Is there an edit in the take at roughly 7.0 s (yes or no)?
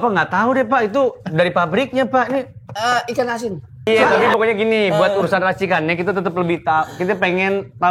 no